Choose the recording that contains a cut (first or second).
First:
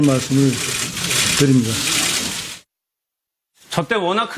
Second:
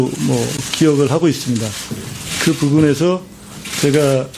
second